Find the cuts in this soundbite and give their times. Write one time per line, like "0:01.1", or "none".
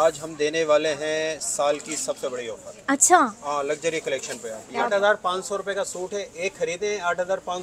0:04.9